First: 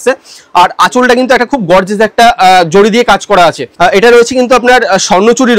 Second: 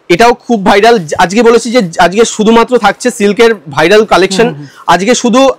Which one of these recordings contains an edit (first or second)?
first